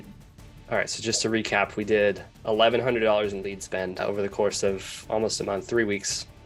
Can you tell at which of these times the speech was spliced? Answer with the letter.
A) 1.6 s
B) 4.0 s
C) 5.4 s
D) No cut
B